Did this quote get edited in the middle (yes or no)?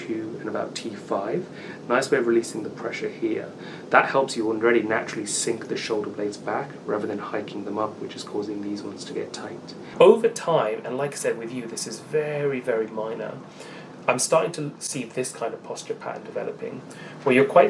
yes